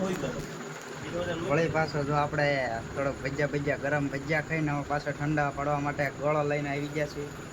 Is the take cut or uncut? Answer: uncut